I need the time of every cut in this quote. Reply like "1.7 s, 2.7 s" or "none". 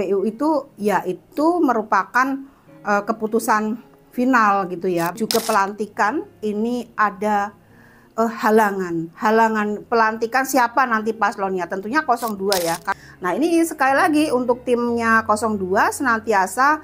5.2 s, 13.0 s